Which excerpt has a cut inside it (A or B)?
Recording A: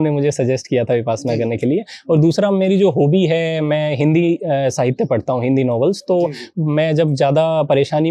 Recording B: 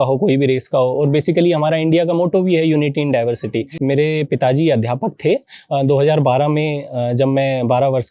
B